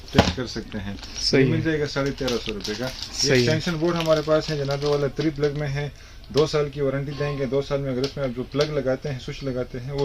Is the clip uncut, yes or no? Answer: yes